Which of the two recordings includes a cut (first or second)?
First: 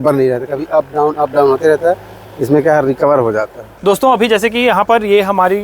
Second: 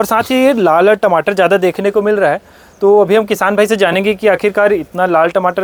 first